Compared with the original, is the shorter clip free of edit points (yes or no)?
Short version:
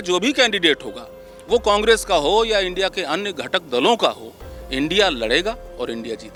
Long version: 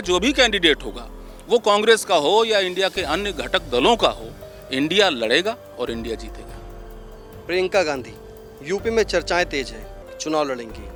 yes